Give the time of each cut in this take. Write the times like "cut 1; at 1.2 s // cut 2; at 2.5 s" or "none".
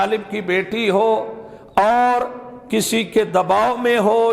none

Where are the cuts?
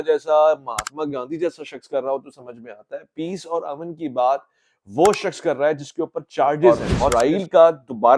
cut 1; at 6.9 s

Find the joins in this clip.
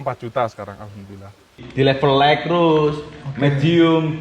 cut 1; at 1.6 s

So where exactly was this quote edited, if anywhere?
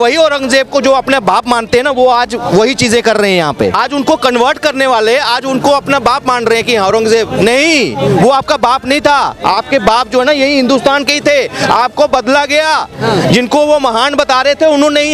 cut 1; at 3.8 s

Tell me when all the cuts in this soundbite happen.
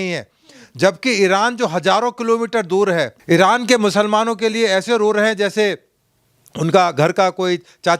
cut 1; at 3.2 s

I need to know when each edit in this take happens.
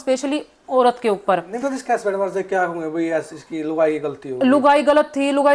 none

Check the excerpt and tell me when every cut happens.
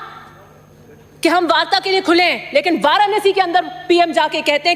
none

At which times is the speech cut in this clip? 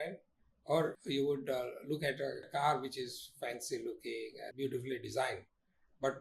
cut 1; at 1.0 s // cut 2; at 2.4 s // cut 3; at 4.5 s

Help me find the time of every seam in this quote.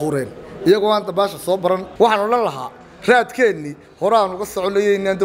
cut 1; at 1.9 s

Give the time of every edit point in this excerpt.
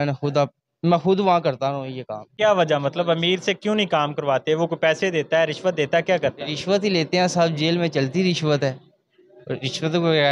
cut 1; at 2.2 s

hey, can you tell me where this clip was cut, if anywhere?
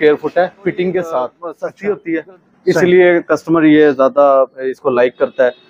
cut 1; at 1.5 s

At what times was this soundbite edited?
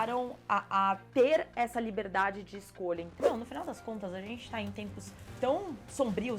cut 1; at 3.2 s

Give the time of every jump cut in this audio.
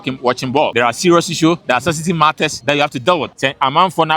cut 1; at 0.7 s // cut 2; at 1.6 s // cut 3; at 2.6 s // cut 4; at 3.3 s

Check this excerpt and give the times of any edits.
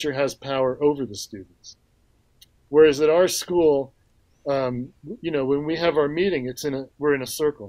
none

